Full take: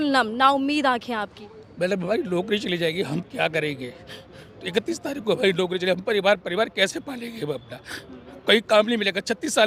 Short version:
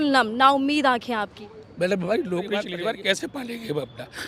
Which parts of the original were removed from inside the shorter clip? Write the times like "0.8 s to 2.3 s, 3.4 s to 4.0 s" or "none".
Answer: 2.7 s to 6.4 s